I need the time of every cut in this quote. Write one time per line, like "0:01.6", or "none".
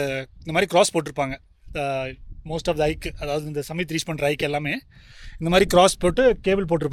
none